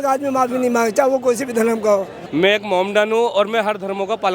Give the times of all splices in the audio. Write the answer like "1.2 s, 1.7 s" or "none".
2.2 s

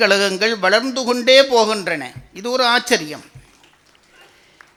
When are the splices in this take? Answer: none

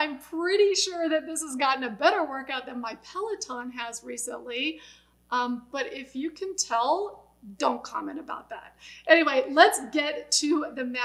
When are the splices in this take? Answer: none

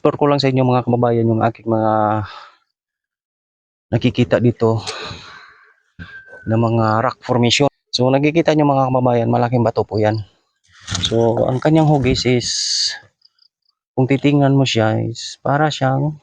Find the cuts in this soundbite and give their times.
7.7 s

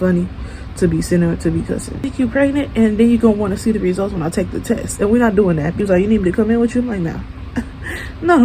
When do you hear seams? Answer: 2.0 s, 5.8 s

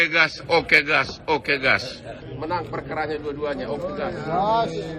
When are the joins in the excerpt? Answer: 2.3 s

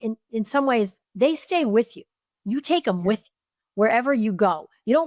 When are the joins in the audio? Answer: 1.0 s

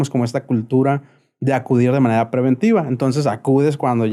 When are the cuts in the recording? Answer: none

